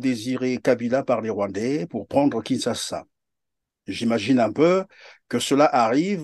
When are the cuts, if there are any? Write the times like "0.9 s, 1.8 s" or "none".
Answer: none